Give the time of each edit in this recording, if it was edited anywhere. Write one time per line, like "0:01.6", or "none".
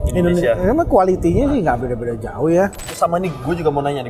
0:02.8